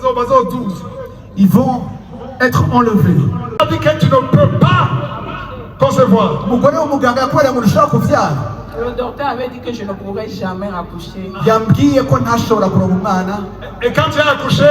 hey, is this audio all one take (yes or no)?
no